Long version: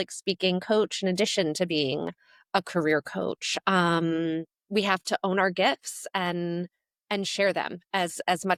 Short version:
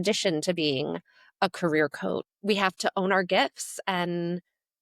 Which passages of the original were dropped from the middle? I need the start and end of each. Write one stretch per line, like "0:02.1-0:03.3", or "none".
0:03.4-0:04.6

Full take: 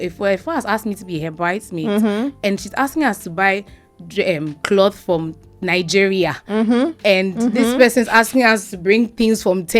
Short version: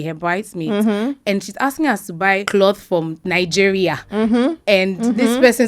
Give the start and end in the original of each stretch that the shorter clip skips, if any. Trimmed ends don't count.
0:03.6-0:04.6
0:05.3-0:05.5

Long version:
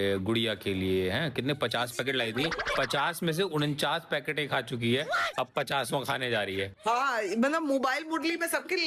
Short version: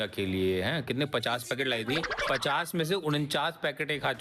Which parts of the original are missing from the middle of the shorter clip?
none

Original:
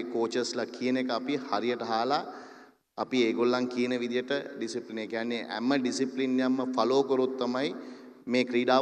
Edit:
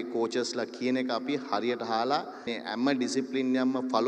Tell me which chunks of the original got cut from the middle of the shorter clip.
0:02.5-0:05.4

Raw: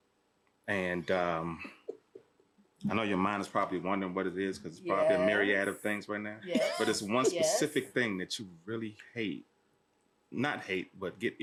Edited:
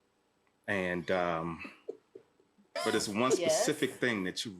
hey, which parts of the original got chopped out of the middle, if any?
0:02.8-0:06.7

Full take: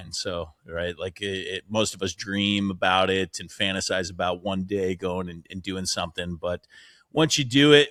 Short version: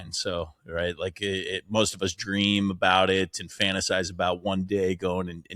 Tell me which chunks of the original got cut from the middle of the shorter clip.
none

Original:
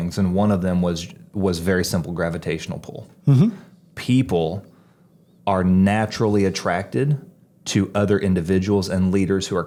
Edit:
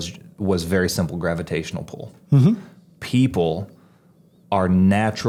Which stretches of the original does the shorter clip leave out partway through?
none

